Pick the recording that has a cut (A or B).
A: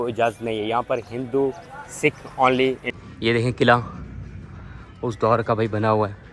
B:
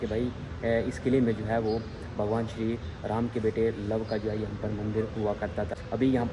A